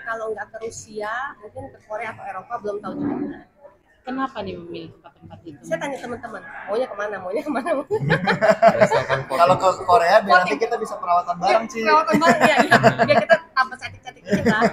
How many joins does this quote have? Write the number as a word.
zero